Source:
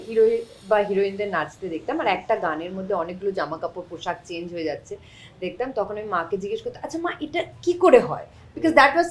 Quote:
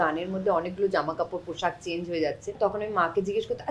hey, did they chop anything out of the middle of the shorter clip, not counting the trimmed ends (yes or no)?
yes